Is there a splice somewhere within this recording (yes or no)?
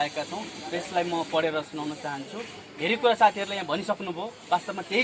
no